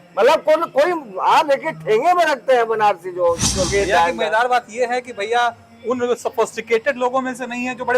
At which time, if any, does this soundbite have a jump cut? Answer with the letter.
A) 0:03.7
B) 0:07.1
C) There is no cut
A